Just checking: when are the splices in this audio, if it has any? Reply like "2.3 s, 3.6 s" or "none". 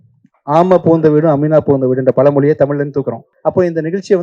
3.2 s